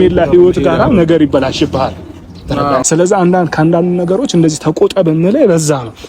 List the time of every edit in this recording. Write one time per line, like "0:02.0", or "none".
0:02.8